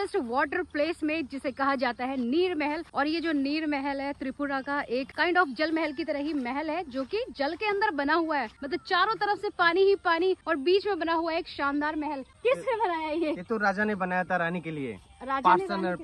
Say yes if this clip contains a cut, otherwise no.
no